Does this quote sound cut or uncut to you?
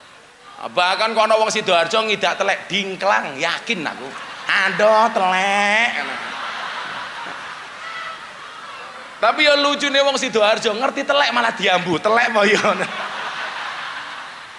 uncut